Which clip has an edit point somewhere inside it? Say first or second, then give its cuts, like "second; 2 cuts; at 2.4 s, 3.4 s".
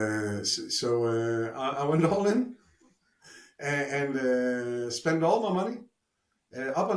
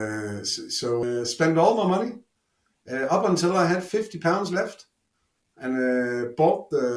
second; 1 cut; at 1.0 s